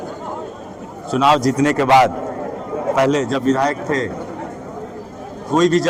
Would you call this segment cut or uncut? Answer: uncut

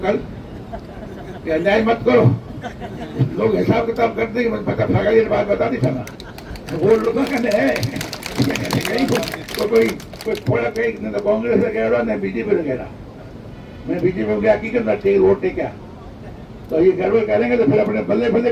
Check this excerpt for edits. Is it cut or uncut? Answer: uncut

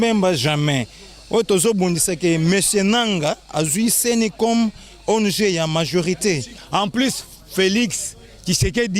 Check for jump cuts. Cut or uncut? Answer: cut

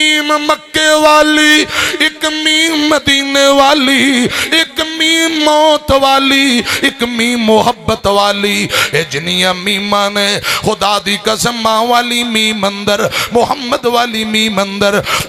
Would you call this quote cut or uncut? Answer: uncut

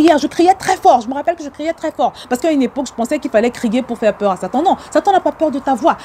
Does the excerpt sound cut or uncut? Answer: uncut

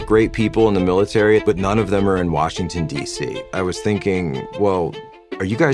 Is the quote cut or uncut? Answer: cut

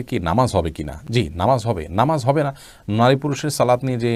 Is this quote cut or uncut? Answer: uncut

